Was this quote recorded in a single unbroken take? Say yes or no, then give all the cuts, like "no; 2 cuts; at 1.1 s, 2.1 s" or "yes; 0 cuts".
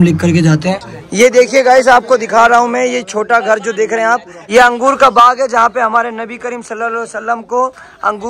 no; 2 cuts; at 0.9 s, 4.3 s